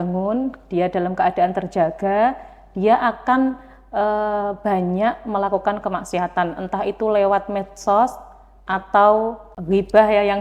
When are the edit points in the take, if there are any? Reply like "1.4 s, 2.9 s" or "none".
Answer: 9.5 s